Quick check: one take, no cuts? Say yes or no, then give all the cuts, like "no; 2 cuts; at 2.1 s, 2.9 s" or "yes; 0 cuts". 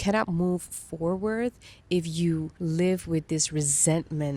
no; 1 cut; at 2.5 s